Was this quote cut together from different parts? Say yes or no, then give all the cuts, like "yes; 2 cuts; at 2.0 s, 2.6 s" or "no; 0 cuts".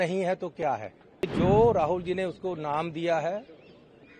yes; 1 cut; at 1.3 s